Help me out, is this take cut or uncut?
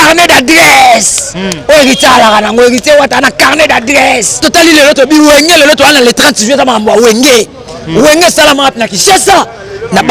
cut